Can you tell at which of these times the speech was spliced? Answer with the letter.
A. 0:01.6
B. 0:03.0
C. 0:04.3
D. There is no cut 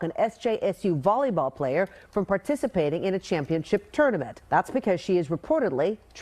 C